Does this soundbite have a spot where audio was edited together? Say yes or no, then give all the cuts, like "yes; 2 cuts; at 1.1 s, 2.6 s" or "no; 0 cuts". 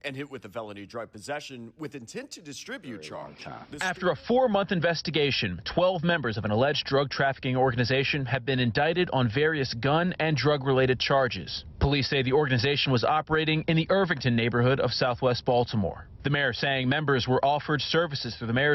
yes; 1 cut; at 3.8 s